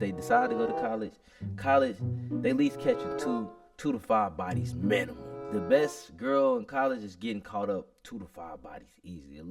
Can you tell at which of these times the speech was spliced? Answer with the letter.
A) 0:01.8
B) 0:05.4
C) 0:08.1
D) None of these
B